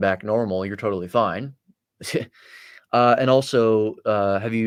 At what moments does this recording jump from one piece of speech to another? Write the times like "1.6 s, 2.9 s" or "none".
none